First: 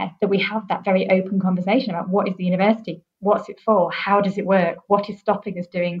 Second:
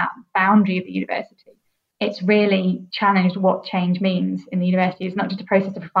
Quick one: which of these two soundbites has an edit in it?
second; 2 cuts; at 1.9 s, 2.9 s

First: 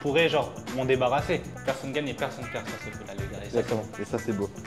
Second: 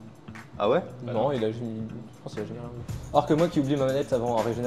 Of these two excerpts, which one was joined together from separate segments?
first; 1 cut; at 1.5 s

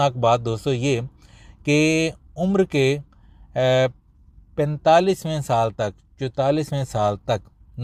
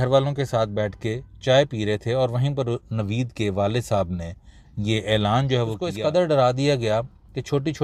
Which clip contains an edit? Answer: second; 1 cut; at 5.8 s

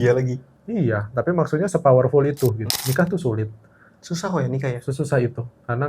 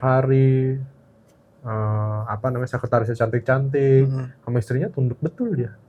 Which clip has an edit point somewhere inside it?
first; 1 cut; at 2.7 s

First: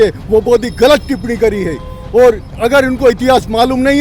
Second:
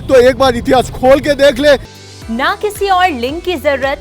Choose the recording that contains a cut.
second; 1 cut; at 2.0 s

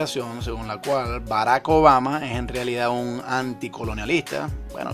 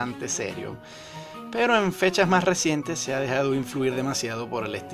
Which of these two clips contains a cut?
second; 1 cut; at 2.8 s

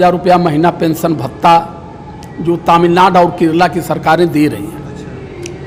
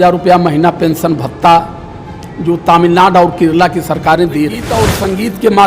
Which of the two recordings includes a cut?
second; 1 cut; at 4.7 s

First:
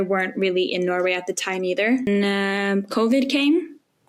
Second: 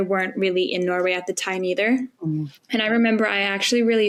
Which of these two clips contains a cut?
first; 1 cut; at 2.1 s

